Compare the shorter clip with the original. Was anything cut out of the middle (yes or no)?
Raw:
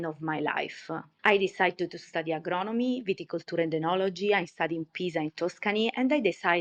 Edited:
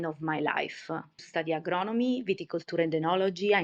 yes